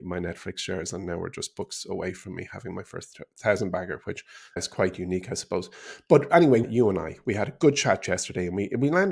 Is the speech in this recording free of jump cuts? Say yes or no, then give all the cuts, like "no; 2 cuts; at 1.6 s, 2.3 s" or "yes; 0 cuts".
no; 2 cuts; at 4.6 s, 6.6 s